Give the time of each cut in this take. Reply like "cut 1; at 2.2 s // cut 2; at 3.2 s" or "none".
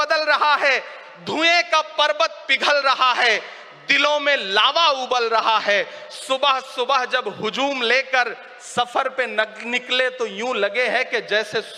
none